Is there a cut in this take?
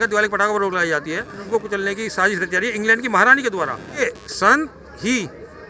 yes; 2 cuts; at 1.4 s, 4.0 s

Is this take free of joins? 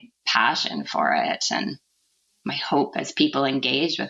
yes; 0 cuts

